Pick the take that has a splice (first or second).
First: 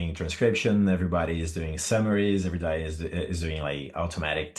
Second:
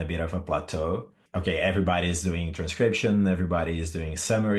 second